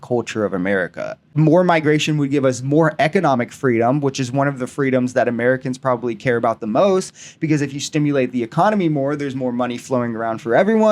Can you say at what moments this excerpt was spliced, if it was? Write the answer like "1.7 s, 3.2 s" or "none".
1.2 s